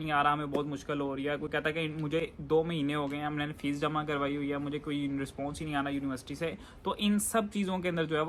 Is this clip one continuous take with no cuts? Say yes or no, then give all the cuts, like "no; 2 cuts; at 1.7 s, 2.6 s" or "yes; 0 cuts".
yes; 0 cuts